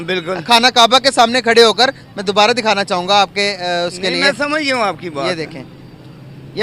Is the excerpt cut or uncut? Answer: uncut